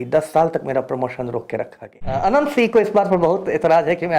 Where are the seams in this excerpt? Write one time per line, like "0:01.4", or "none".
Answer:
0:02.2